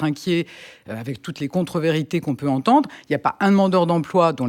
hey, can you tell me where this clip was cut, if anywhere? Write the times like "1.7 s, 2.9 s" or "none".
none